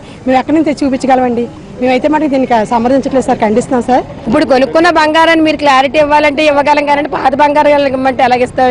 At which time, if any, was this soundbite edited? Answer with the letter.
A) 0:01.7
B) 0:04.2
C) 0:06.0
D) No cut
B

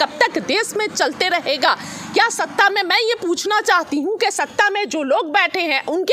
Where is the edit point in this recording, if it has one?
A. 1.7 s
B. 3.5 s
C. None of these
C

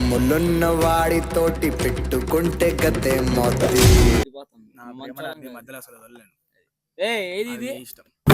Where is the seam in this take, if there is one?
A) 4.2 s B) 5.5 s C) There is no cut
A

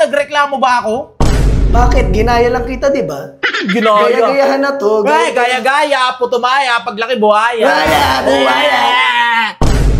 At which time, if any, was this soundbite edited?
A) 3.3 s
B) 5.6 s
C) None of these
C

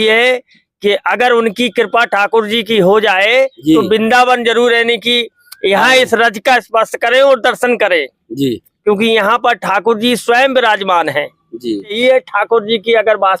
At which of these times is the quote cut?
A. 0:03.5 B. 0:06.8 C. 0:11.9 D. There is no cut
C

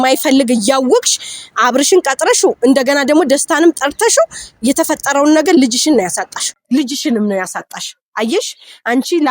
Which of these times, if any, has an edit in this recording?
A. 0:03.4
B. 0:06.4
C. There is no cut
B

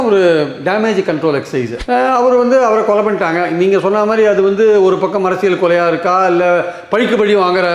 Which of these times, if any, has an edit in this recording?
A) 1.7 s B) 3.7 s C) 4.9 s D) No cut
A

